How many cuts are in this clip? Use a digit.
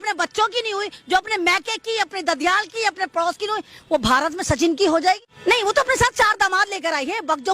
1